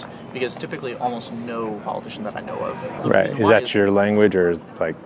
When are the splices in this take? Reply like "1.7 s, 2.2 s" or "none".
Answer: 3.0 s